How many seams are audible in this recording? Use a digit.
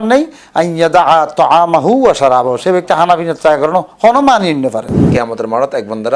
1